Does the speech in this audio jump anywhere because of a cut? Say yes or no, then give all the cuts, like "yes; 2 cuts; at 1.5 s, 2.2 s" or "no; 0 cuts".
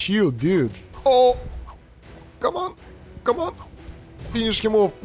no; 0 cuts